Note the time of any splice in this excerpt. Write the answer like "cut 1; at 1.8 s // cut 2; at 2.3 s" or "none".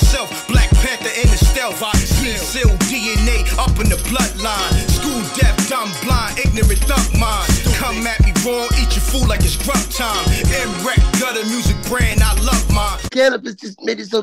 cut 1; at 13.0 s